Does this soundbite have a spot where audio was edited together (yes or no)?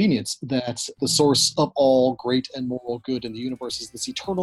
yes